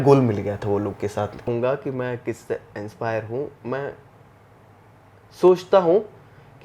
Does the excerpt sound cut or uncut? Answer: cut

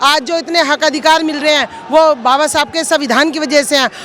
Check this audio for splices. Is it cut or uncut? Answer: uncut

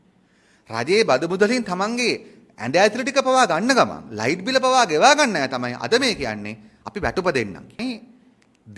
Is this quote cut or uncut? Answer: cut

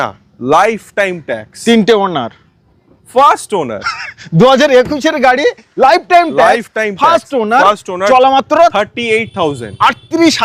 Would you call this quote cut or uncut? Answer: uncut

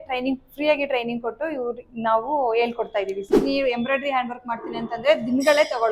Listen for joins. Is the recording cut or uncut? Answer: cut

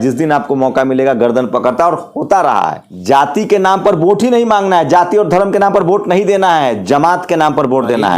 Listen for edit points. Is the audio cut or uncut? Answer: cut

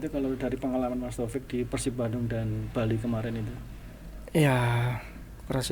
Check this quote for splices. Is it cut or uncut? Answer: uncut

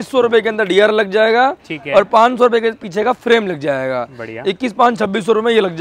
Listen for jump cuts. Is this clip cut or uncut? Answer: uncut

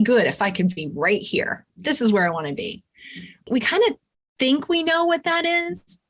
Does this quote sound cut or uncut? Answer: cut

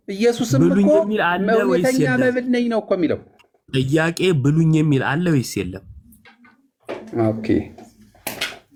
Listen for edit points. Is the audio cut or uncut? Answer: uncut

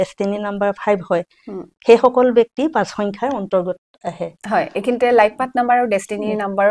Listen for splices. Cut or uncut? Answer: uncut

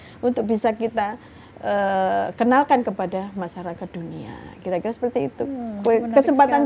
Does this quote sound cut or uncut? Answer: uncut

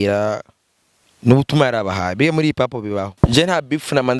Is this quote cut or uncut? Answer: cut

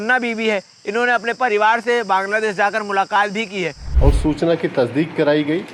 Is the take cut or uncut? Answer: cut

